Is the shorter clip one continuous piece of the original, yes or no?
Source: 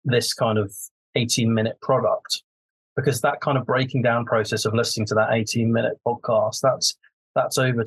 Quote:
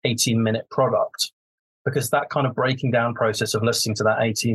yes